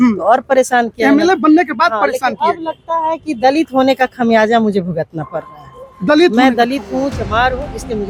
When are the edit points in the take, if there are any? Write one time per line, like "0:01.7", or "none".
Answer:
none